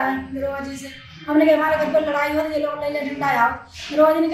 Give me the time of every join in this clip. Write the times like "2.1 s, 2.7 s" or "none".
none